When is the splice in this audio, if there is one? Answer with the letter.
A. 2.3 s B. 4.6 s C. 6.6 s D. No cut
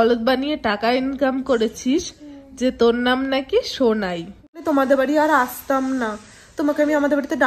B